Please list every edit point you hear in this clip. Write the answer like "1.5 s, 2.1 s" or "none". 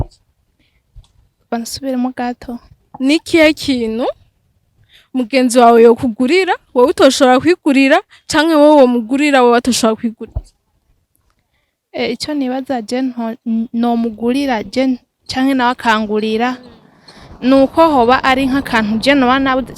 none